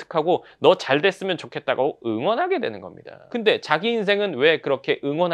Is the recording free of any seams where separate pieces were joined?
yes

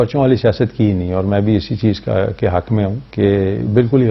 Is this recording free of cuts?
yes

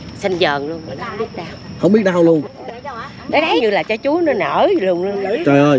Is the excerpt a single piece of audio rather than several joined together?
no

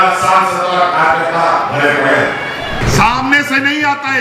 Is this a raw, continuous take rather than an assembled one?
no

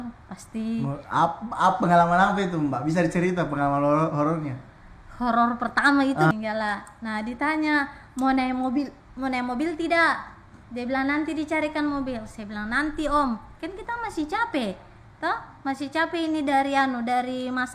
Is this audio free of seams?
no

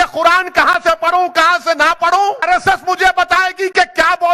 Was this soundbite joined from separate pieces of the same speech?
yes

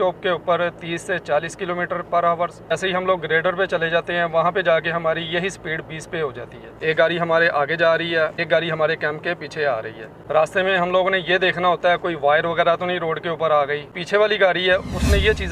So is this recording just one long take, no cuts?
no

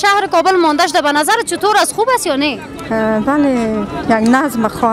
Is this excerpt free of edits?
yes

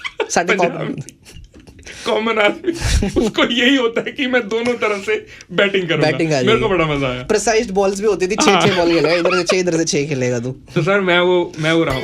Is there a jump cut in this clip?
no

